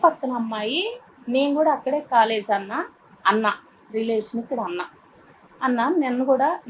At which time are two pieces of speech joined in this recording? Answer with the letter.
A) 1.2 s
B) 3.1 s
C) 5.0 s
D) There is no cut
D